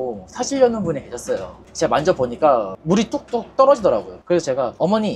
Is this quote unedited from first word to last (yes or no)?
yes